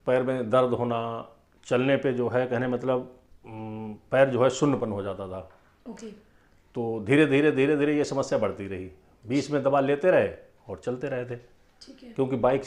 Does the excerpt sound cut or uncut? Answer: uncut